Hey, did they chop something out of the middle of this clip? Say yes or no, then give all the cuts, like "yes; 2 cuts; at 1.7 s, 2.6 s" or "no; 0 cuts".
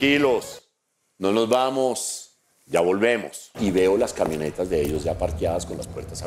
yes; 1 cut; at 3.6 s